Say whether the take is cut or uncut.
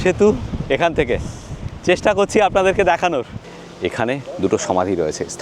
cut